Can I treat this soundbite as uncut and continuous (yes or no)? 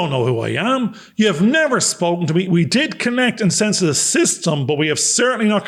yes